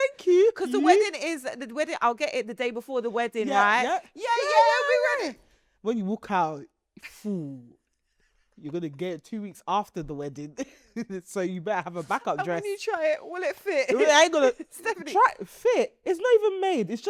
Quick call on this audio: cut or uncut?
uncut